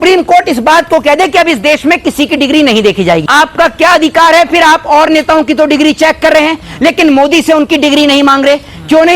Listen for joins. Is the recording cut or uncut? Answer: cut